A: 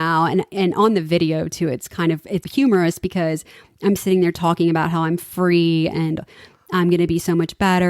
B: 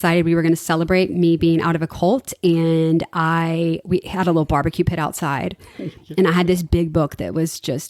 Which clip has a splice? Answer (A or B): A